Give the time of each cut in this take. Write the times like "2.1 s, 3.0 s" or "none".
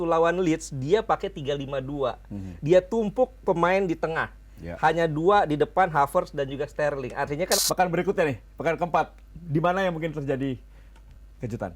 7.6 s

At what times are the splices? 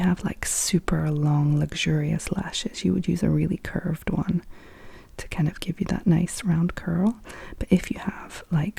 none

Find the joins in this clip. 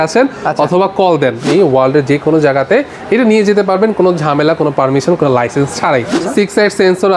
1.4 s, 6.2 s

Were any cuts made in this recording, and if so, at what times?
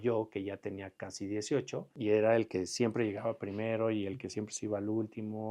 1.9 s

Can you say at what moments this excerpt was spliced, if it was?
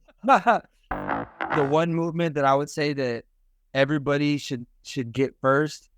1.1 s

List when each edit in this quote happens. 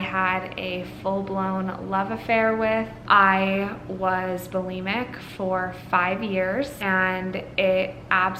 6.8 s

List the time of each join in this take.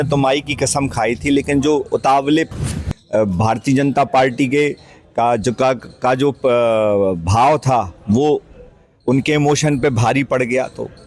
2.6 s

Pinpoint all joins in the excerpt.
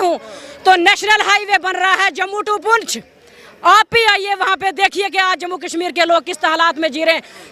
none

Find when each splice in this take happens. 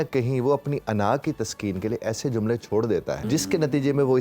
3.2 s

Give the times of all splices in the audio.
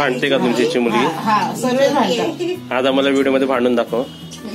none

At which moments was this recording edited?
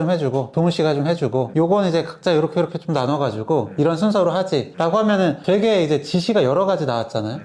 none

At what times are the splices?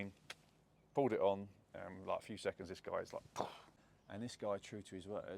3.7 s

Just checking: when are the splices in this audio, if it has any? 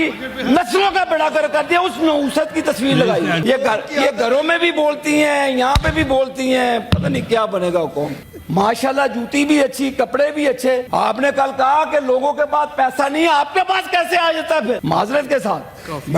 3.4 s, 8.3 s, 10.9 s, 14.8 s

